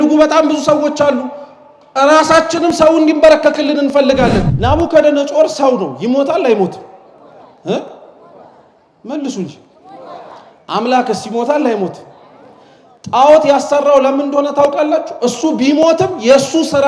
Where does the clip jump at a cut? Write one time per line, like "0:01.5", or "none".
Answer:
0:04.5